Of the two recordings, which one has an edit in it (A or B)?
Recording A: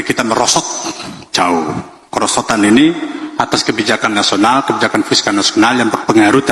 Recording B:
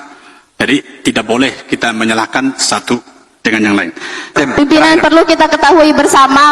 B